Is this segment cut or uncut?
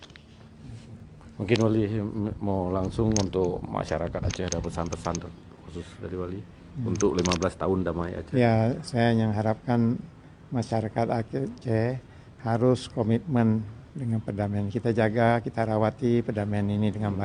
cut